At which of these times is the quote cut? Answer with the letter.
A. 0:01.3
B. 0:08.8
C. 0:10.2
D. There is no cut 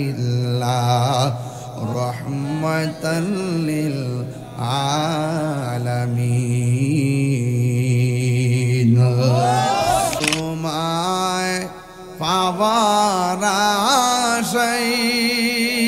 C